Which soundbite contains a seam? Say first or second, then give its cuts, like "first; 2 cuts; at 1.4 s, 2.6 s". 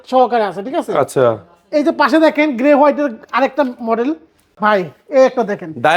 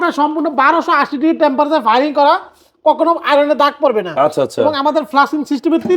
first; 1 cut; at 4.5 s